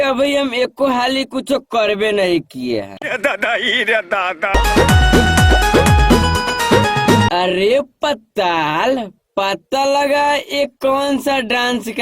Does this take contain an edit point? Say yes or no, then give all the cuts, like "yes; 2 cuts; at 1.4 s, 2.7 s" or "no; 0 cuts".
yes; 2 cuts; at 3.1 s, 4.5 s